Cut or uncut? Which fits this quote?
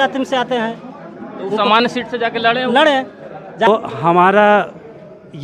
cut